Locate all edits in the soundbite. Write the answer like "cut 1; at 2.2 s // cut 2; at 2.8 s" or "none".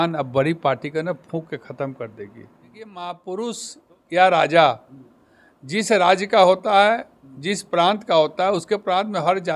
cut 1; at 2.9 s